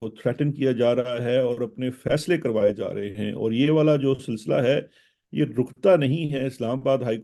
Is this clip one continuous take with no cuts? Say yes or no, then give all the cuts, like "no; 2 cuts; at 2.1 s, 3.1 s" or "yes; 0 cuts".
yes; 0 cuts